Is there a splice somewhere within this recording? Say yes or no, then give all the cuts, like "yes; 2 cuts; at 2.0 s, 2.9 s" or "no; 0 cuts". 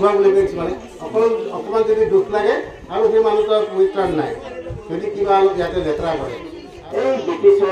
yes; 1 cut; at 6.8 s